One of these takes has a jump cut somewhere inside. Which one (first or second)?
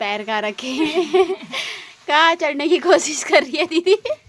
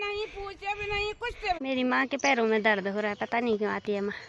second